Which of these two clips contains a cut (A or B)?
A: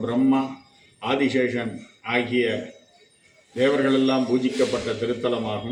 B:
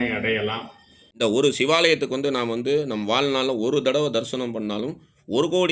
B